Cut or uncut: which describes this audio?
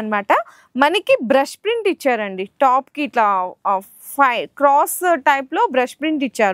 uncut